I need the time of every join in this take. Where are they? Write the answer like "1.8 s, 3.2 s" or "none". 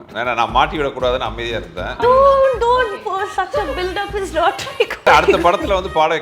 2.0 s, 5.0 s